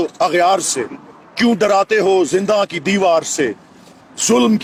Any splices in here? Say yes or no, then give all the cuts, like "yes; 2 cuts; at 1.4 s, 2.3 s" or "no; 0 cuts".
no; 0 cuts